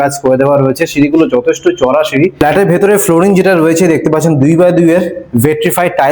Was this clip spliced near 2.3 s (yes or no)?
yes